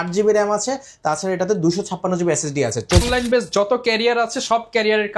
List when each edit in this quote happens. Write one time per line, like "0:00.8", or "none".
0:03.0